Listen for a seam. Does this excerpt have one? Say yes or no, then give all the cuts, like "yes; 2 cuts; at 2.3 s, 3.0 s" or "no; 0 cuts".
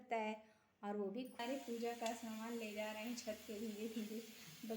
yes; 1 cut; at 1.4 s